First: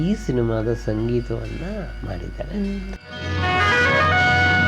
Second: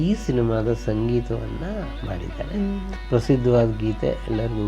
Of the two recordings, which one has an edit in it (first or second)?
second